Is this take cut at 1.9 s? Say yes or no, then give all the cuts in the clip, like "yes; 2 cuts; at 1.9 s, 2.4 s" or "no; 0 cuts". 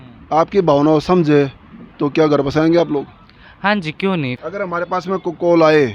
no; 1 cut; at 4.4 s